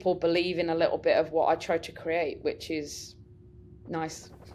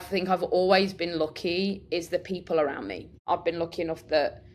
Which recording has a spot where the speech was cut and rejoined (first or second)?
second